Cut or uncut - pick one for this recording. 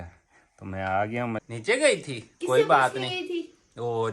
cut